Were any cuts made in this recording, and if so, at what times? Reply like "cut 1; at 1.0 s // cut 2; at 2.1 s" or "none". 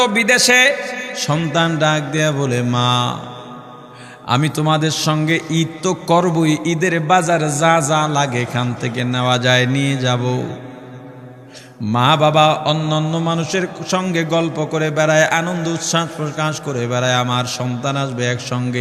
cut 1; at 1.1 s